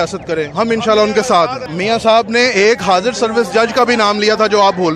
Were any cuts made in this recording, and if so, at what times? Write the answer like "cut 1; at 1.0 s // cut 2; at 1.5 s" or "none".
cut 1; at 1.7 s